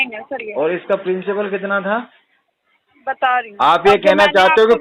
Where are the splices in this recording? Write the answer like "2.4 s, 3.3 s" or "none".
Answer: 3.5 s